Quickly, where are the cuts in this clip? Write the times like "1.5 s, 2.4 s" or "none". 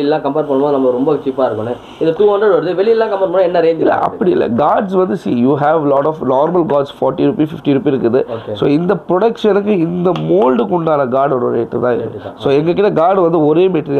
none